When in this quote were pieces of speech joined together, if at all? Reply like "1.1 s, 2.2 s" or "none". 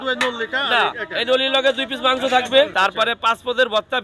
2.7 s

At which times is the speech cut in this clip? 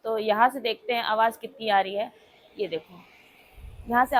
none

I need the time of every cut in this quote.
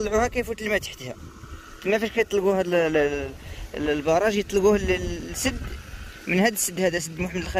none

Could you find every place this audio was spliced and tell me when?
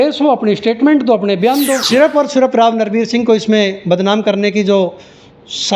1.8 s

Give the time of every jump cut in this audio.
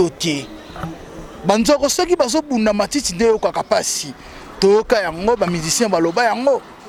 none

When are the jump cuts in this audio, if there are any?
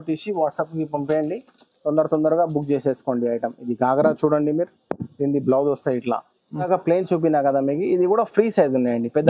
6.6 s

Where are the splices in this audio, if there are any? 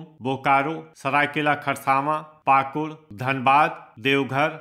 none

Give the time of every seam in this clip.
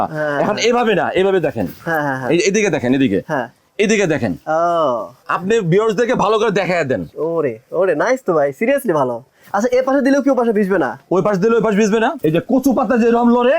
5.3 s, 12.2 s

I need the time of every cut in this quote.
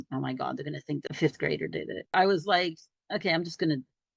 1.1 s, 2.1 s

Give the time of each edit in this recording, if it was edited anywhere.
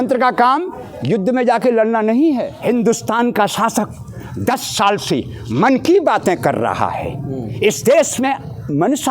2.5 s

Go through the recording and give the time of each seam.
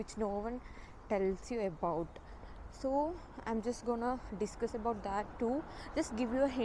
none

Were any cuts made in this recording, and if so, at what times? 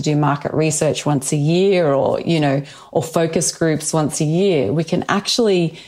none

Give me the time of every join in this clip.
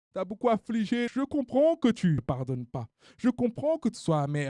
1.1 s, 2.2 s

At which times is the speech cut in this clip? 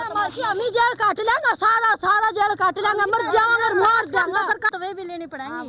4.7 s

